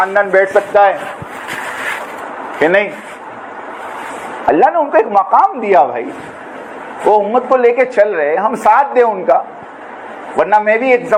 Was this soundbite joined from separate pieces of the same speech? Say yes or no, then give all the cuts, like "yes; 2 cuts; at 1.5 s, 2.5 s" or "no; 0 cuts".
no; 0 cuts